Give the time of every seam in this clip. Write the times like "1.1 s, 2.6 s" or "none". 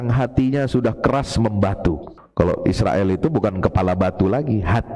2.1 s